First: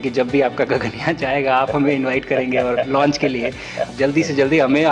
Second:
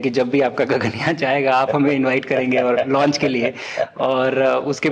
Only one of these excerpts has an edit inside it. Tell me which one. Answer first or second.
first